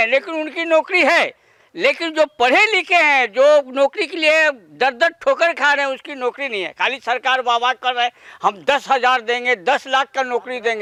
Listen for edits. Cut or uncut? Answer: uncut